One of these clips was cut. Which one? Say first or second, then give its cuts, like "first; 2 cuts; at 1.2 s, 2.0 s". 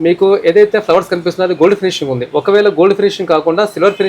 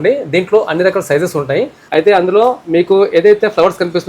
second; 1 cut; at 1.8 s